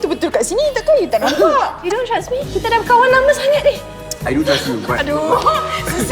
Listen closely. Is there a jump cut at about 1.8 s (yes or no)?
yes